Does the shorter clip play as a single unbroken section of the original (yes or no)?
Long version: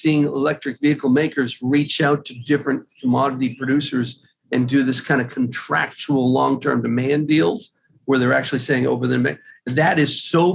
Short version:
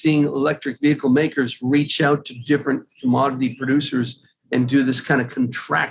yes